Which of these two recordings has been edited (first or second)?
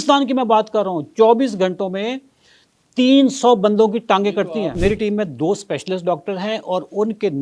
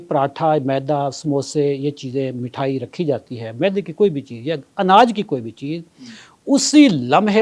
first